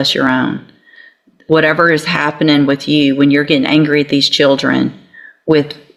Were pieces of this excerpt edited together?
no; 0 cuts

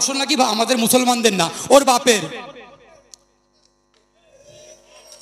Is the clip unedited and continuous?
yes; 0 cuts

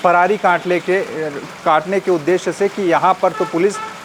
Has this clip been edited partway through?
no; 0 cuts

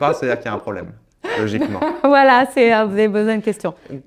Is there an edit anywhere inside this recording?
no; 0 cuts

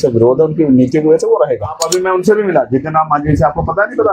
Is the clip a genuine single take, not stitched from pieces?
no; 1 cut; at 1.8 s

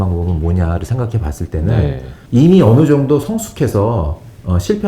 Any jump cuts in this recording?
yes; 1 cut; at 2.1 s

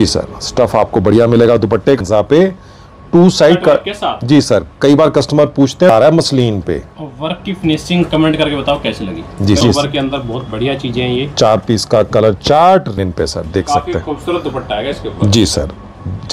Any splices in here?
yes; 4 cuts; at 2.0 s, 5.9 s, 9.6 s, 13.0 s

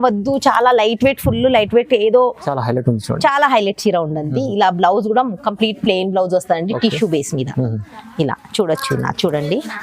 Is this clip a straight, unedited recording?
no; 1 cut; at 2.5 s

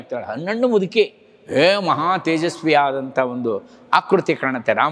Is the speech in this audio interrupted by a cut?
no; 0 cuts

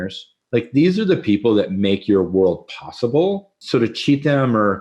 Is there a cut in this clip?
yes; 1 cut; at 3.5 s

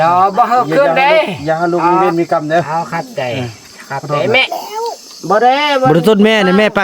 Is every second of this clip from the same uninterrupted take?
no; 1 cut; at 4.6 s

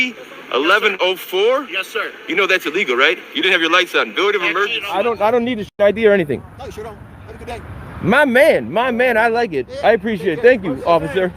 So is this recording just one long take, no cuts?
no; 1 cut; at 4.8 s

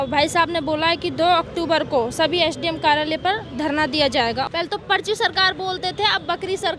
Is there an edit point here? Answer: yes; 1 cut; at 4.5 s

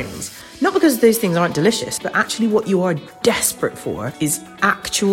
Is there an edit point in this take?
yes; 2 cuts; at 1.9 s, 4.1 s

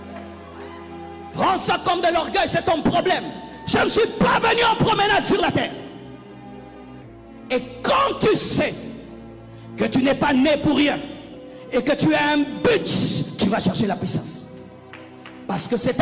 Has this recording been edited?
no; 0 cuts

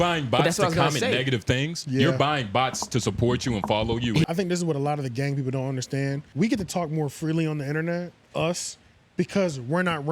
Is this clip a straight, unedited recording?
no; 2 cuts; at 4.3 s, 6.3 s

